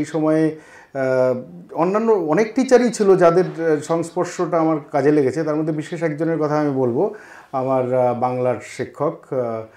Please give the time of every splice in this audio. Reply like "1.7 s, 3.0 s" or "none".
none